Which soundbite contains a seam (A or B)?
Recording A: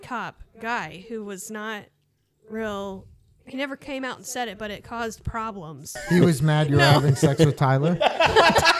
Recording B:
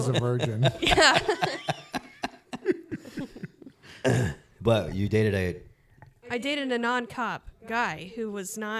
A